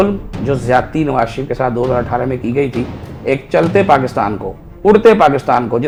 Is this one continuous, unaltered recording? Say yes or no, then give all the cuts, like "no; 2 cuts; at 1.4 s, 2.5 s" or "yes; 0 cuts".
yes; 0 cuts